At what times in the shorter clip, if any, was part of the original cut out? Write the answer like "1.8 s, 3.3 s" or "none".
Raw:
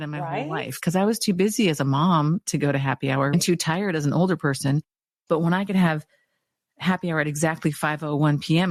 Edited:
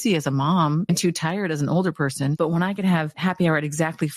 0.9 s, 2.3 s, 3.1 s